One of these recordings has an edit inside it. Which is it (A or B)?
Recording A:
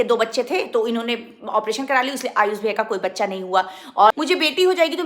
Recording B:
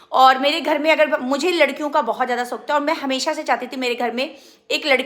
A